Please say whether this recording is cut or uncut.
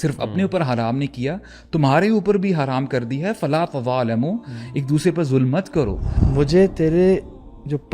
cut